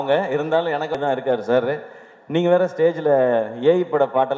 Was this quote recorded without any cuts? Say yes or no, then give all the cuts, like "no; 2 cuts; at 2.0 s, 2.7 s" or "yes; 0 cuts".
no; 1 cut; at 1.0 s